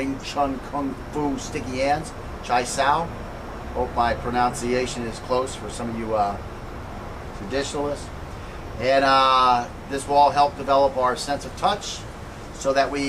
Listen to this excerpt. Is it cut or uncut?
cut